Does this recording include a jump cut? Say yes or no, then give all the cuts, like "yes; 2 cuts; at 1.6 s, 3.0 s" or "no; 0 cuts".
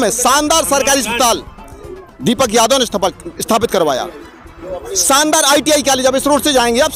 no; 0 cuts